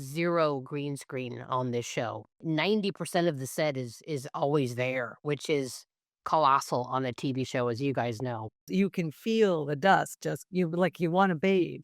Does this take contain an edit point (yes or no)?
yes